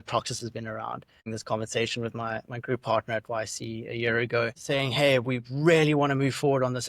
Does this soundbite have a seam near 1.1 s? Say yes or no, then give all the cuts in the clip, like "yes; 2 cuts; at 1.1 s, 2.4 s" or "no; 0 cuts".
yes; 1 cut; at 1.1 s